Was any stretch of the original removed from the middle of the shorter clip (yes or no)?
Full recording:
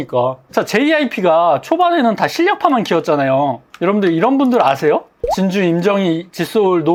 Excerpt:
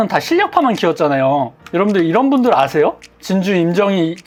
no